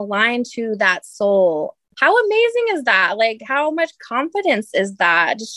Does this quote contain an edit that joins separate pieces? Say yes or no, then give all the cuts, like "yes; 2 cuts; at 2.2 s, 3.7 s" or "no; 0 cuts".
yes; 1 cut; at 1.8 s